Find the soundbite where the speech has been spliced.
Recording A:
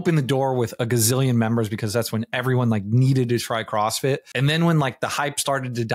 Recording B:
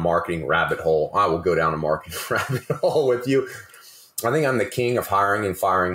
A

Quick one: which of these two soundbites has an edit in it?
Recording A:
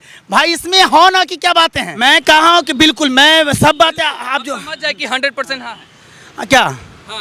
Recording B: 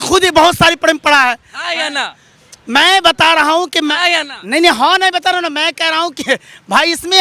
A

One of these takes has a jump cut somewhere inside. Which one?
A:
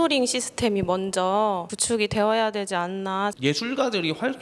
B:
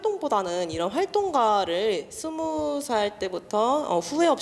A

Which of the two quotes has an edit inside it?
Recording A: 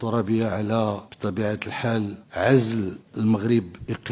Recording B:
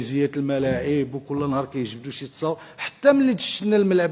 A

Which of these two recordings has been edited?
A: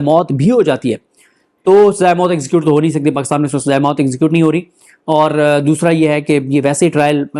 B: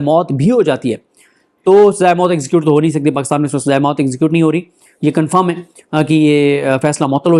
B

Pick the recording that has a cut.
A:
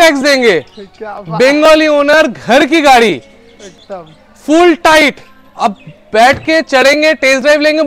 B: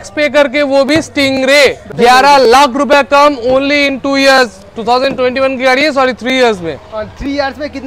B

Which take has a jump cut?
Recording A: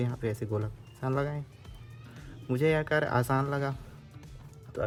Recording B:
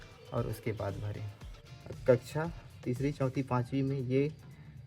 B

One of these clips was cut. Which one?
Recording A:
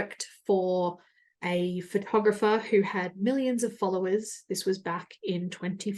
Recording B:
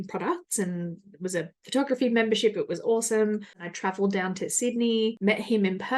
B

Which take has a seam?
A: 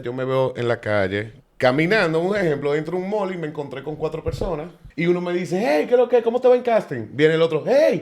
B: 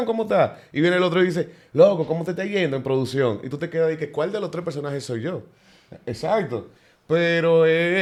A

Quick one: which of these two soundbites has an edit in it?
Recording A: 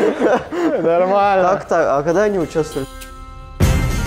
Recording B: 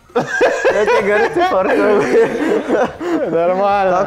A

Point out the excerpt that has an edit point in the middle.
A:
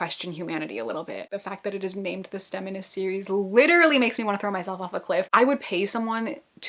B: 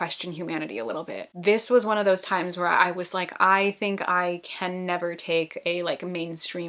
A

